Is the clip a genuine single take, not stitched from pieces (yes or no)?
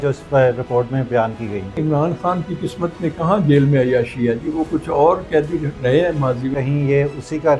no